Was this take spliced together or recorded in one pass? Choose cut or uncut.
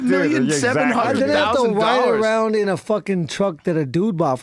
uncut